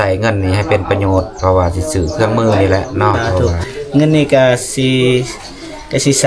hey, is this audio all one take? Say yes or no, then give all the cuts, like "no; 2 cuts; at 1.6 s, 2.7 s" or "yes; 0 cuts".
no; 1 cut; at 3.5 s